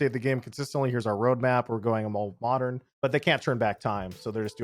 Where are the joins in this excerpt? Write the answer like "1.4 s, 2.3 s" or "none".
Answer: 2.9 s